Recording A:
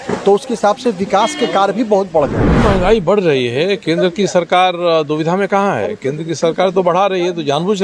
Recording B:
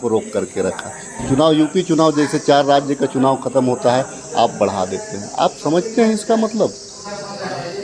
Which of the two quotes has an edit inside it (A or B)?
A